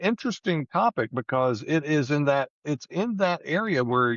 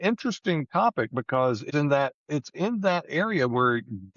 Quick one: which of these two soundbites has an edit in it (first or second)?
second